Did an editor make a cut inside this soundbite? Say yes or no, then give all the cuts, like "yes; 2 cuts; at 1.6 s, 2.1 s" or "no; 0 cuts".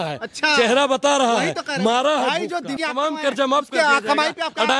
yes; 1 cut; at 2.7 s